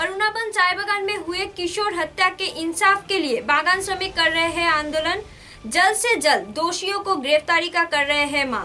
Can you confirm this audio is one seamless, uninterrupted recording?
yes; 0 cuts

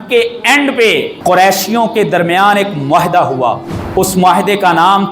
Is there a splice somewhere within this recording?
yes; 2 cuts; at 1.1 s, 3.7 s

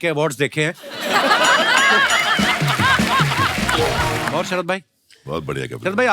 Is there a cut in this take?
yes; 1 cut; at 4.3 s

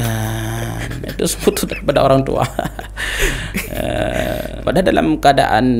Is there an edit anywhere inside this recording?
yes; 1 cut; at 4.5 s

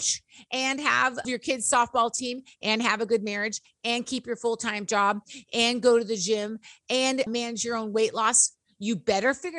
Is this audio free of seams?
no; 2 cuts; at 1.2 s, 7.3 s

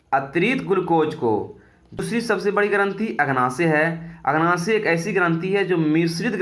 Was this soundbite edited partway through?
yes; 1 cut; at 2.0 s

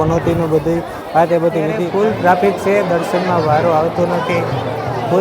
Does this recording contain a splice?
yes; 1 cut; at 1.8 s

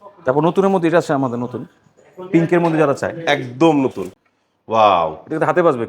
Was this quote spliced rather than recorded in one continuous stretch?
yes; 1 cut; at 4.0 s

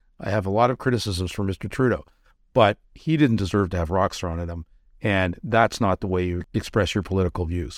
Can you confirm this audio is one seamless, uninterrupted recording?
no; 1 cut; at 6.4 s

